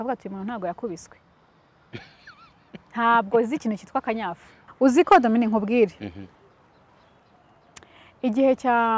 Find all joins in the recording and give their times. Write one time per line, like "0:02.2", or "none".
0:04.5